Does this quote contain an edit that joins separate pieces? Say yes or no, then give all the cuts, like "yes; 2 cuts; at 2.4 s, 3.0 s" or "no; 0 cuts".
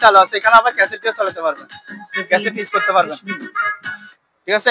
no; 0 cuts